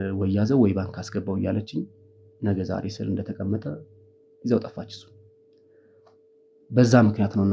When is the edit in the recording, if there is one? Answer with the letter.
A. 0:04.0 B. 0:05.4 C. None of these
C